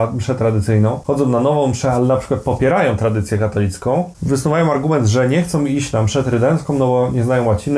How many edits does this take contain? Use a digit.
2